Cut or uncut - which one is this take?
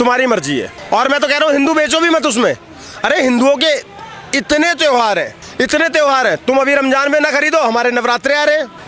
uncut